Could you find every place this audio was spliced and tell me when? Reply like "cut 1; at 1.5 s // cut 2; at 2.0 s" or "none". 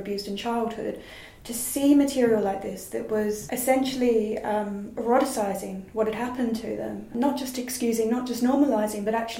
none